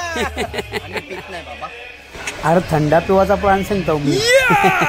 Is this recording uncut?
yes; 0 cuts

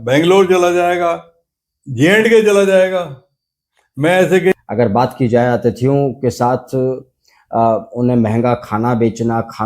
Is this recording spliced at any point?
yes; 1 cut; at 4.5 s

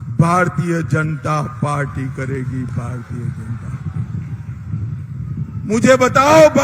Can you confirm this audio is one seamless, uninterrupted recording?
yes; 0 cuts

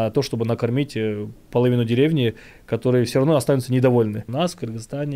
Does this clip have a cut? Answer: yes; 1 cut; at 4.2 s

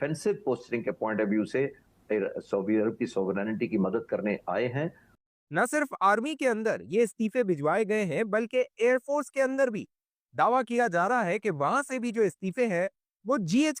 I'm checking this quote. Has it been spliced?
no; 0 cuts

